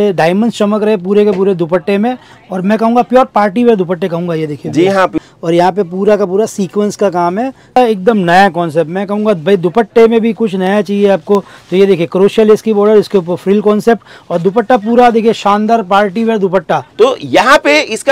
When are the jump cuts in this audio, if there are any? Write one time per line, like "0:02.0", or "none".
0:05.1
0:07.8
0:16.9